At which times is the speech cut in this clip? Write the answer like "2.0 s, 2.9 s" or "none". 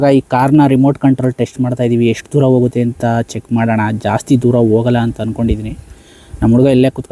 none